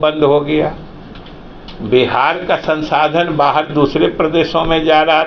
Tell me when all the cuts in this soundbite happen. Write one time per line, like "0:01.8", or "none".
none